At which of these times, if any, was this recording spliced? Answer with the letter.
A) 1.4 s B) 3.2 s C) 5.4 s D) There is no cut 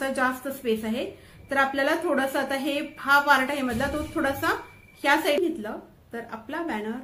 C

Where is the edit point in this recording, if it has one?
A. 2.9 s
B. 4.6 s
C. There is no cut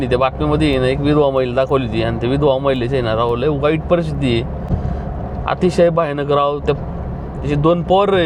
C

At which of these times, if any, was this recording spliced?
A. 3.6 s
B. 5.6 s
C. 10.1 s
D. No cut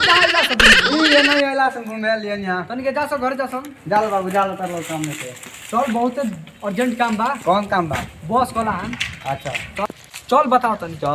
C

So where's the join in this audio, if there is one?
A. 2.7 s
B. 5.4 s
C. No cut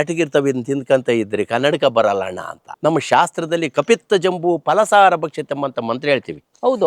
A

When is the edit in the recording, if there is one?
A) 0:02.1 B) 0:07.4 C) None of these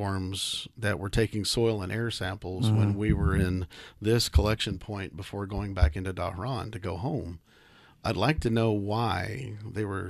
C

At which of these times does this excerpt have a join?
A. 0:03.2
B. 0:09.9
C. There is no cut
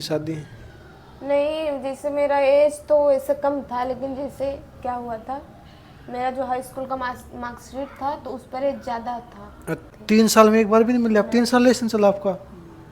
B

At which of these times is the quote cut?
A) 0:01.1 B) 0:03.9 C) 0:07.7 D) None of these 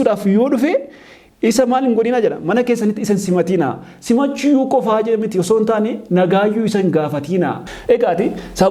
C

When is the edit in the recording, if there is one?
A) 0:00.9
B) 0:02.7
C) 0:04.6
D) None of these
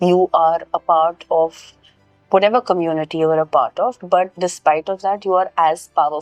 D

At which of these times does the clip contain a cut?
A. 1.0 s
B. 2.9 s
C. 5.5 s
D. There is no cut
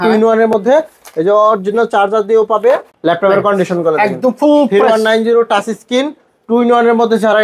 B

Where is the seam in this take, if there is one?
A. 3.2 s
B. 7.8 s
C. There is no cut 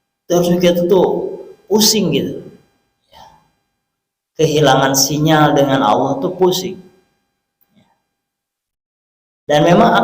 C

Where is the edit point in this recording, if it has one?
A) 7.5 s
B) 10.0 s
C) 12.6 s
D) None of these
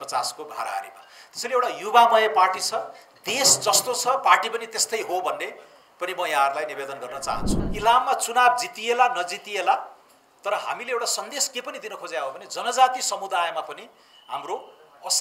A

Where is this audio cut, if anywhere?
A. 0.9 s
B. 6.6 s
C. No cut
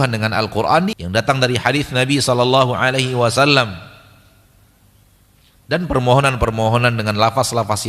A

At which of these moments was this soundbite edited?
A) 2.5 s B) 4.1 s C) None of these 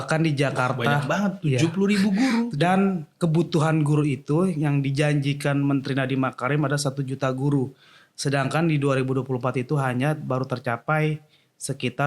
A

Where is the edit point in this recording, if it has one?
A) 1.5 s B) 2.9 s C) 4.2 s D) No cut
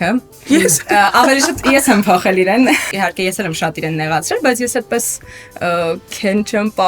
B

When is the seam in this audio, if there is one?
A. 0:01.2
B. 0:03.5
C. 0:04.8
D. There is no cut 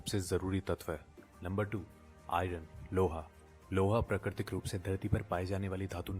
A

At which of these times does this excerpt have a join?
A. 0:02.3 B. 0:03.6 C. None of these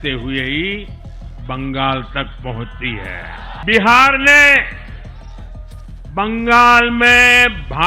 B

